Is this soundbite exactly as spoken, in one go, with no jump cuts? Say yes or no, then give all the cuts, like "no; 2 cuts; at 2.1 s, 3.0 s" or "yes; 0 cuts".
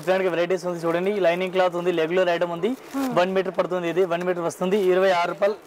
yes; 0 cuts